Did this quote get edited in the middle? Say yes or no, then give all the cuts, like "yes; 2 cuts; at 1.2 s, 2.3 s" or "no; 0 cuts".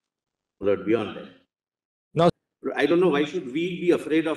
yes; 1 cut; at 2.3 s